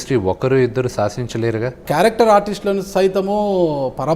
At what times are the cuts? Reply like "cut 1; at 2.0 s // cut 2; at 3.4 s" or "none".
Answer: cut 1; at 1.8 s